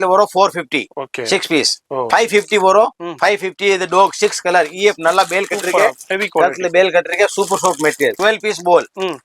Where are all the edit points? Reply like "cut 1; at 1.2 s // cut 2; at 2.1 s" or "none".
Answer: cut 1; at 2.1 s // cut 2; at 8.2 s